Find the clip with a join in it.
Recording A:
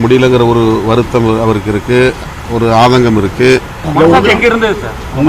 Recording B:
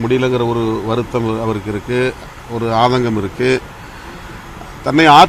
A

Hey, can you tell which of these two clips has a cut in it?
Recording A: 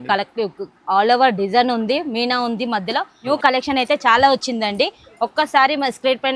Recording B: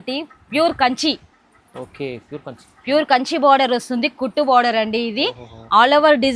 A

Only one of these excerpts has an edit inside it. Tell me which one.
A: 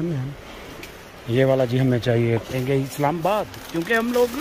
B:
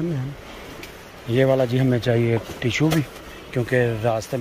A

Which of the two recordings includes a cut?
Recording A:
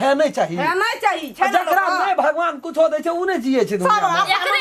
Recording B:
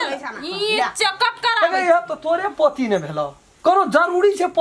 B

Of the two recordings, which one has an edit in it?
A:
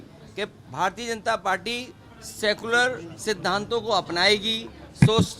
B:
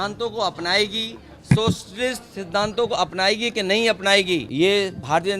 B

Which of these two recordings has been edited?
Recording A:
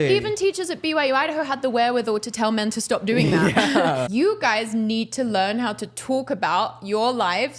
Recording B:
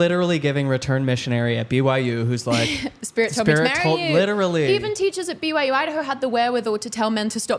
A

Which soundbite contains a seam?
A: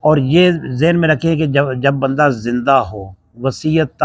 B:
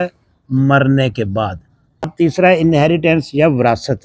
B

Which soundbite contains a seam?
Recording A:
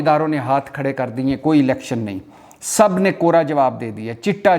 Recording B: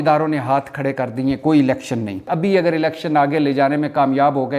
B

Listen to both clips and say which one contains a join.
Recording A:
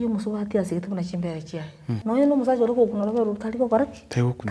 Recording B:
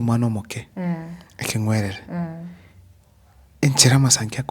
A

